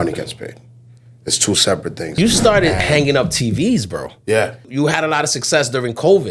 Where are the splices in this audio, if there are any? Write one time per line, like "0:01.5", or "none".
0:02.2
0:04.6